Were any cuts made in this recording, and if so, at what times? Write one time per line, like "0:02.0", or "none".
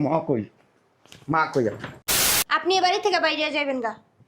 0:02.3